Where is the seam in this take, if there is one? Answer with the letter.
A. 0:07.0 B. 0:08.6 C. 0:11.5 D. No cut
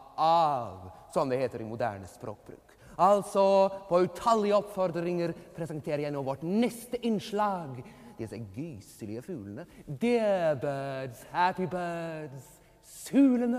A